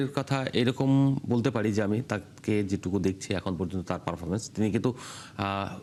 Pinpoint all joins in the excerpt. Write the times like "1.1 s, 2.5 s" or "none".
none